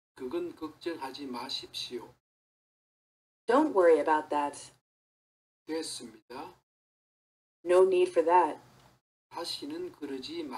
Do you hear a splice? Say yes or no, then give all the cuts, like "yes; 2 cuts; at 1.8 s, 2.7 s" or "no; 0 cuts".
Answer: no; 0 cuts